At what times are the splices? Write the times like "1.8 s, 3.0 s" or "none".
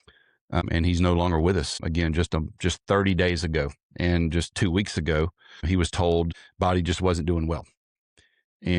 6.4 s